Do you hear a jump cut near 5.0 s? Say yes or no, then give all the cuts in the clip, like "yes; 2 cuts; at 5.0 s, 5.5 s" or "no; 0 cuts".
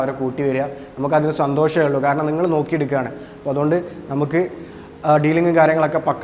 no; 0 cuts